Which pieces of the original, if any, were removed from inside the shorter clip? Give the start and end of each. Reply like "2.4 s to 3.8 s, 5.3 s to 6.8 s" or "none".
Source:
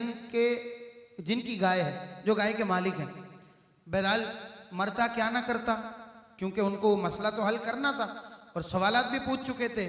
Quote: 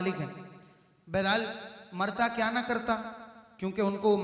none